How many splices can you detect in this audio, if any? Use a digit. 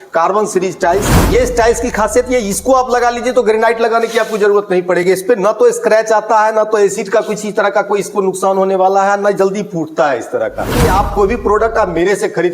2